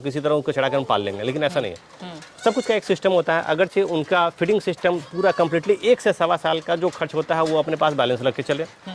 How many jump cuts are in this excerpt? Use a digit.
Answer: 0